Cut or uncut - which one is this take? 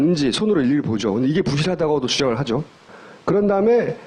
cut